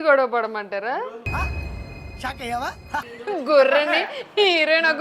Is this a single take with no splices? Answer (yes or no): no